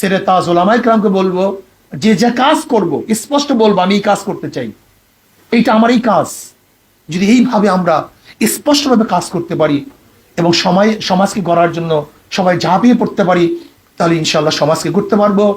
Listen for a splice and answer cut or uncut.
uncut